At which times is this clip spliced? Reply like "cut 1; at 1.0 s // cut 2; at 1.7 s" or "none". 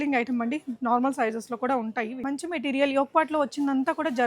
cut 1; at 2.2 s